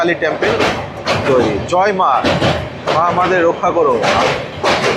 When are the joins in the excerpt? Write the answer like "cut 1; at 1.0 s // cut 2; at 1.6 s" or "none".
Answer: none